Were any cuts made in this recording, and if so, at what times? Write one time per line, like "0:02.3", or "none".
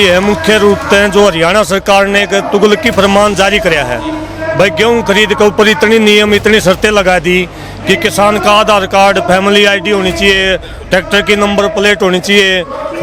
none

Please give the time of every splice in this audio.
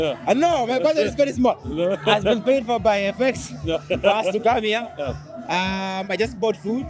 none

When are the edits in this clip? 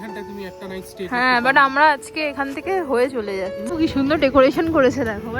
0:03.6

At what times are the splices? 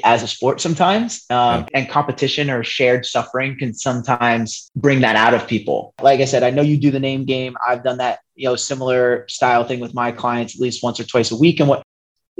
0:01.7
0:06.0

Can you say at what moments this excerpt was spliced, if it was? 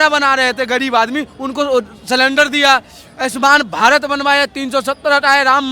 none

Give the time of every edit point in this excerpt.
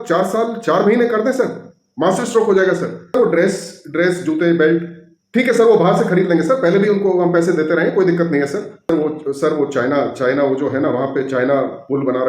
0:03.1
0:08.9

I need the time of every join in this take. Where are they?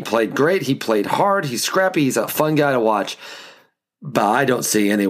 0:02.3

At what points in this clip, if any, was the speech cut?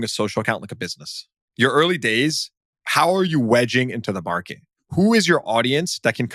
0:01.4
0:04.8

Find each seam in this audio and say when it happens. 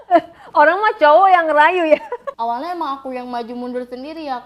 0:02.2

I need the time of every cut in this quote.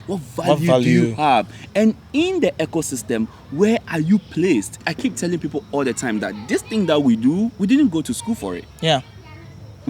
0:04.8

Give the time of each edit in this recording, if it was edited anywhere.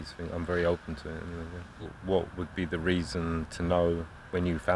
0:01.9

